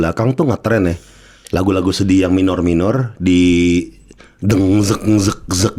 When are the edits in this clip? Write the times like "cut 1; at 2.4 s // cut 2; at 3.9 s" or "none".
none